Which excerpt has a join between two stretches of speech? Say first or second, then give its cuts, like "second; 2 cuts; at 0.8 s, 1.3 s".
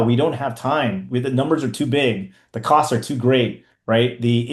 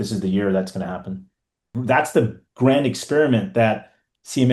second; 1 cut; at 1.8 s